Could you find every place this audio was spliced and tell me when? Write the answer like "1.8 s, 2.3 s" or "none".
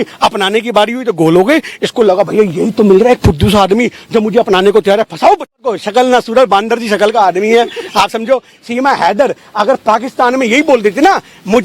5.6 s